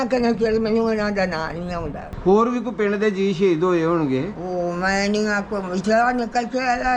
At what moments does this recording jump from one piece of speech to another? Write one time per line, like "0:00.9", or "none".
0:02.0